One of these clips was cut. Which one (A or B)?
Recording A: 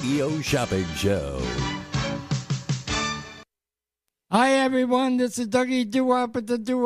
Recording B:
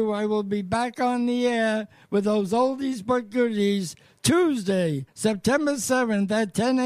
A